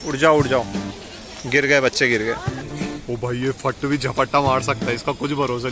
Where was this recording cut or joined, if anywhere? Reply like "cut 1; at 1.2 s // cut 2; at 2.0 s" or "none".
cut 1; at 2.6 s